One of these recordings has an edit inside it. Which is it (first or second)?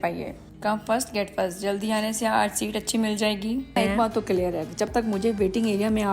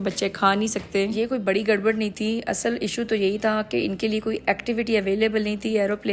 first